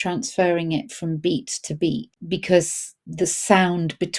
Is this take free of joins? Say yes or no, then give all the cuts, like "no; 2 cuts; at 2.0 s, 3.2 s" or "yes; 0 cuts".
no; 2 cuts; at 2.1 s, 3.0 s